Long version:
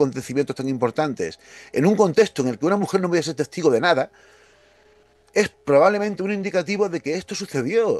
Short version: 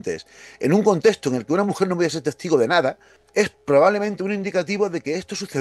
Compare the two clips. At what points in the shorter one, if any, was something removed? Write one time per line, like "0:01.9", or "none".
0:03.1